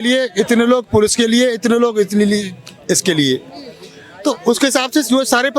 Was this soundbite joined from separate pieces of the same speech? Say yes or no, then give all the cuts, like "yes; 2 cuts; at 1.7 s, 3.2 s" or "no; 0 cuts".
no; 0 cuts